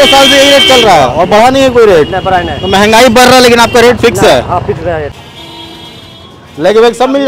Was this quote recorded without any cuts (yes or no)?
no